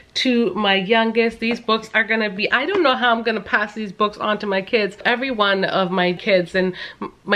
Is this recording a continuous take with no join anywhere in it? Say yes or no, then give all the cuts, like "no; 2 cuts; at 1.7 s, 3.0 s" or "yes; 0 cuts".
no; 2 cuts; at 5.0 s, 6.2 s